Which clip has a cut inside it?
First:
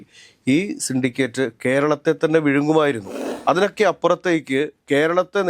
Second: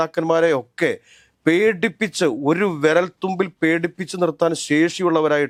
first; 1 cut; at 3.1 s

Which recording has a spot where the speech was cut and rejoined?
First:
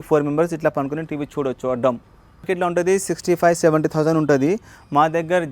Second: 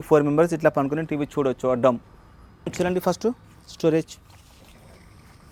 first; 1 cut; at 2.4 s

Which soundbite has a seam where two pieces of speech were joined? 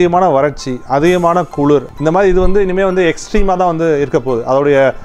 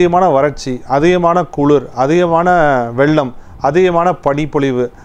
first; 1 cut; at 1.9 s

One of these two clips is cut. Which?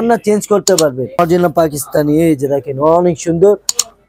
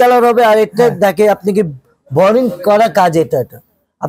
first; 1 cut; at 1.2 s

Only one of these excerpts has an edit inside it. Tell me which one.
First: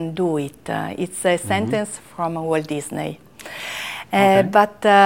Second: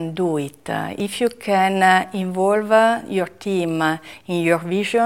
second; 1 cut; at 0.9 s

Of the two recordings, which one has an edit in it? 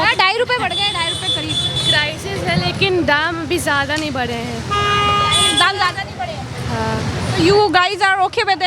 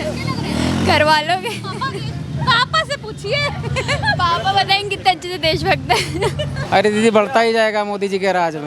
second; 1 cut; at 6.6 s

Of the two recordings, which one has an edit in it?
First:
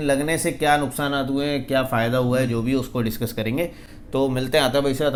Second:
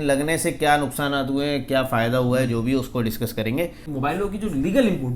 second; 1 cut; at 3.8 s

